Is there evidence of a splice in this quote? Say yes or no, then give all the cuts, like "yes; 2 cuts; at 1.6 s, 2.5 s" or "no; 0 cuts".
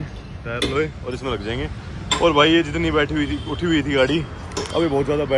no; 0 cuts